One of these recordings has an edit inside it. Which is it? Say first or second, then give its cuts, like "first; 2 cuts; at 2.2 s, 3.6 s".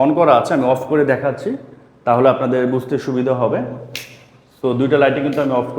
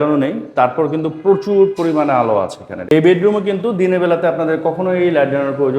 second; 1 cut; at 2.9 s